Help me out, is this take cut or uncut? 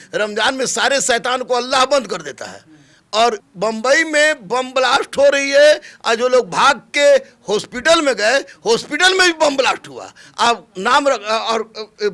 uncut